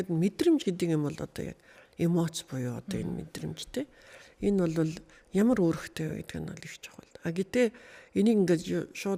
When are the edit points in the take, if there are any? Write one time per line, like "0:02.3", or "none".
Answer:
none

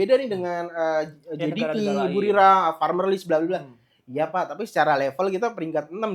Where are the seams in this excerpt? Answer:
none

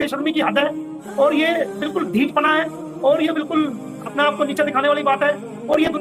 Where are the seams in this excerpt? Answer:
none

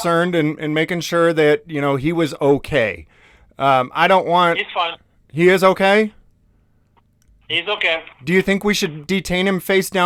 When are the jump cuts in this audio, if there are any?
none

